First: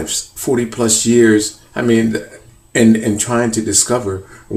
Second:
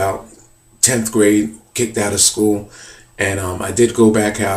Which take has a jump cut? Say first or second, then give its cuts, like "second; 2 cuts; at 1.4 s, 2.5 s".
second; 1 cut; at 3.5 s